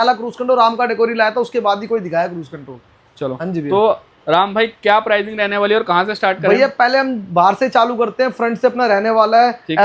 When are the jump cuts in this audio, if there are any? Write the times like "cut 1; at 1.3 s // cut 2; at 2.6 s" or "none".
none